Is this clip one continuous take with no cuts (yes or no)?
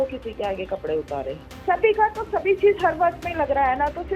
no